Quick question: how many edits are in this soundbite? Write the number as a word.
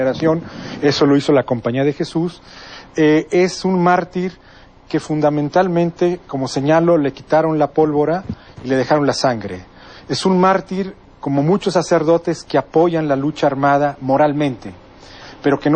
zero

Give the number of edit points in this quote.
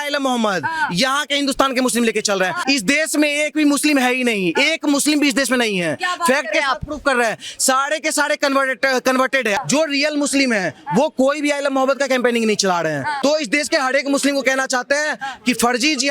three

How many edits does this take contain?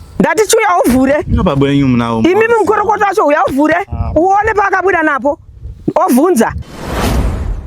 one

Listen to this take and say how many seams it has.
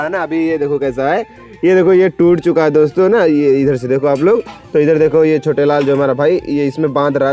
zero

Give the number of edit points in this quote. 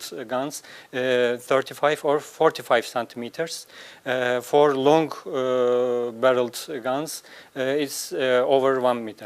one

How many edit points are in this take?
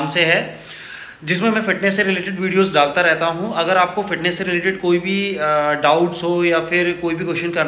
zero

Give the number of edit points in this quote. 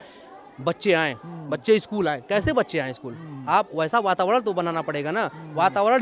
zero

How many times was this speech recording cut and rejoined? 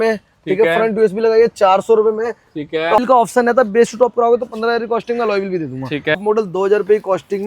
two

